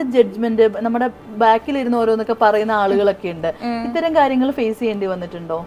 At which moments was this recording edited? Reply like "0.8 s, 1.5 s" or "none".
none